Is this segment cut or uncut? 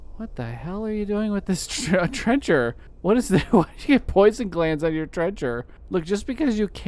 cut